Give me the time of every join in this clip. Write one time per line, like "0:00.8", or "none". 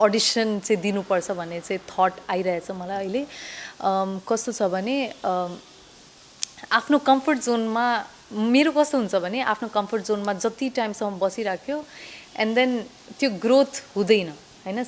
none